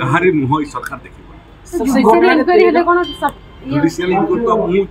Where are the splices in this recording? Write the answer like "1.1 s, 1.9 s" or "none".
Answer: none